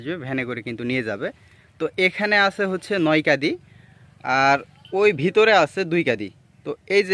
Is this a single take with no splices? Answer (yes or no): yes